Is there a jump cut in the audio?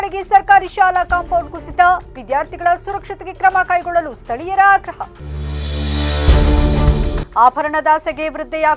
no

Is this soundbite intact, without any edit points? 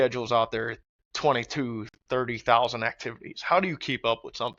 yes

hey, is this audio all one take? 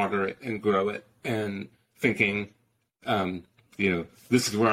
yes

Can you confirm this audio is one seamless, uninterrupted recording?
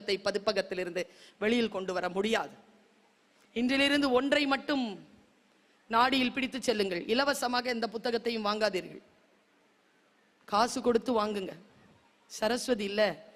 yes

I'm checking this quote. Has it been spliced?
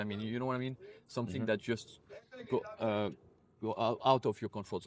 no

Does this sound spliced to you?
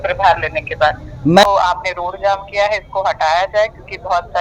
yes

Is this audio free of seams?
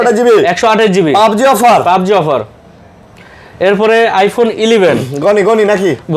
yes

